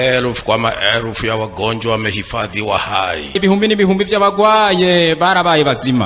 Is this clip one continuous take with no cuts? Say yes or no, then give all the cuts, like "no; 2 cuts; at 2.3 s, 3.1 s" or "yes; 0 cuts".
no; 1 cut; at 3.3 s